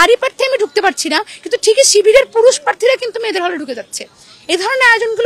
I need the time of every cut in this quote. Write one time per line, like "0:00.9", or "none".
none

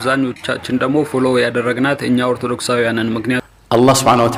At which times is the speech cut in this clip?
0:03.4

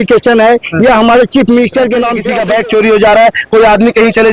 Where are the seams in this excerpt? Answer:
0:02.3

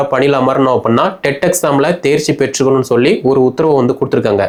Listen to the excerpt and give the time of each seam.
none

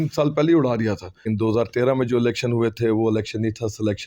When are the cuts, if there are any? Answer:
0:01.1

